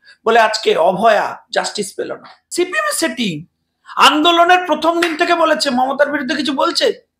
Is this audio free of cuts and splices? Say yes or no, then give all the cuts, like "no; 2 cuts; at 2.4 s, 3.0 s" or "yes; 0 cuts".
no; 1 cut; at 2.3 s